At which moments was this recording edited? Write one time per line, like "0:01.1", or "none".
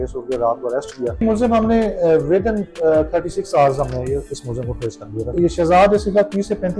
0:01.2
0:05.3